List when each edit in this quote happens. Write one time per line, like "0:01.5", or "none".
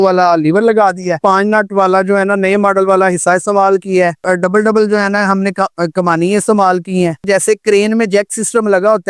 0:01.2
0:04.2
0:07.3